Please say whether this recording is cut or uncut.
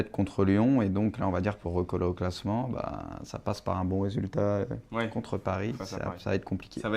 cut